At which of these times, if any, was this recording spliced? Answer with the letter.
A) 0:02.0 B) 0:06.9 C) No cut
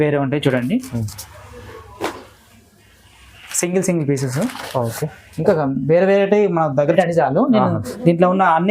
B